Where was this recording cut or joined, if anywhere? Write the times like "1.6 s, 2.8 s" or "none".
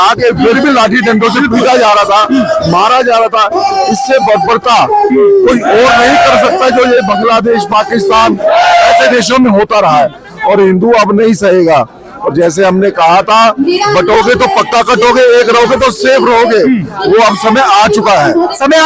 none